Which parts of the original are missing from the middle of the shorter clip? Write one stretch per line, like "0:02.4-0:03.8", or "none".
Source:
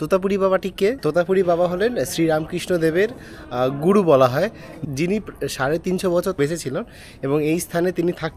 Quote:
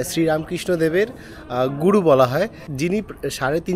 0:04.6-0:04.8